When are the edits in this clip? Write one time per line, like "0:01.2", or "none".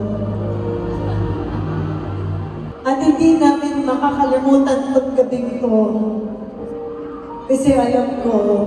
0:02.7